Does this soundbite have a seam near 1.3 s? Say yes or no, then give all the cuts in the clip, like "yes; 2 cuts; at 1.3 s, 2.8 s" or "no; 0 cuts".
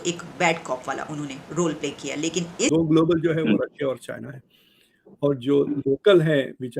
no; 1 cut; at 2.7 s